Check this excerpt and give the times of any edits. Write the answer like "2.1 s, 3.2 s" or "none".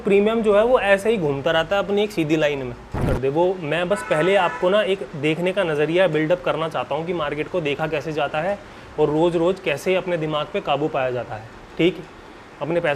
3.1 s